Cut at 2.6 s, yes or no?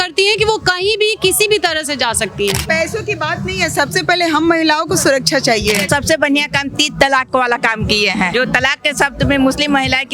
yes